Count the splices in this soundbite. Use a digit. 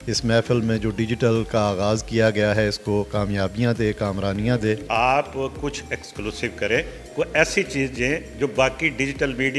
1